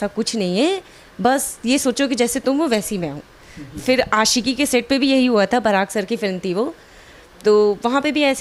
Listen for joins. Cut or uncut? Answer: uncut